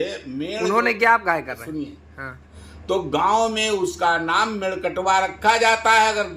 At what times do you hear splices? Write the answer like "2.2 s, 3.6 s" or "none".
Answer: 2.5 s